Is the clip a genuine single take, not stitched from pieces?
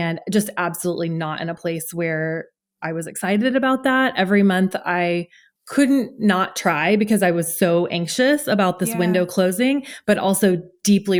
yes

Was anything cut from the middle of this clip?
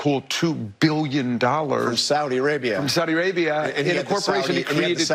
no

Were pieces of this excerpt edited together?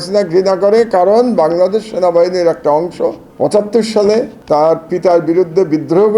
yes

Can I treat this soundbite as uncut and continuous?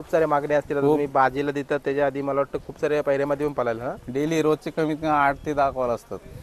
yes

